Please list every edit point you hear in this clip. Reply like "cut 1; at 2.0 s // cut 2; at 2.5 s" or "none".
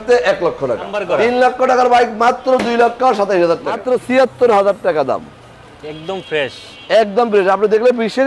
cut 1; at 0.9 s // cut 2; at 3.8 s